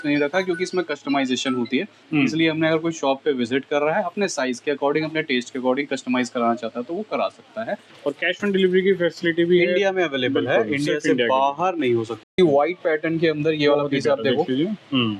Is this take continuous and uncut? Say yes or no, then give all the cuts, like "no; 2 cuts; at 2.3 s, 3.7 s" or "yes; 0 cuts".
no; 2 cuts; at 7.9 s, 12.2 s